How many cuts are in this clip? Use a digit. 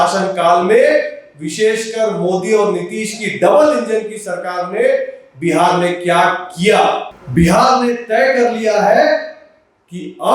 1